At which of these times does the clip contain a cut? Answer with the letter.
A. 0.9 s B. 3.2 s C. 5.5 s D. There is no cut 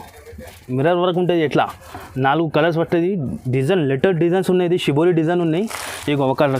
D